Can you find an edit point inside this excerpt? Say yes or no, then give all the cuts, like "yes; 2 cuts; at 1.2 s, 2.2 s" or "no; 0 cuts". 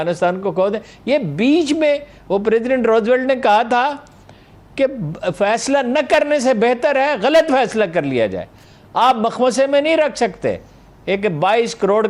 no; 0 cuts